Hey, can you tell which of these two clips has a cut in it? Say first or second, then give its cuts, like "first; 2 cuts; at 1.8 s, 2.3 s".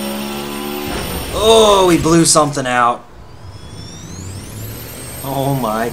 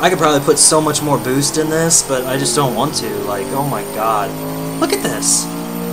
first; 1 cut; at 3.5 s